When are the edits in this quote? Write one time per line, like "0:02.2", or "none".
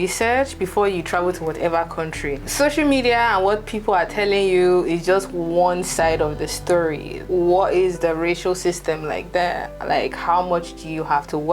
none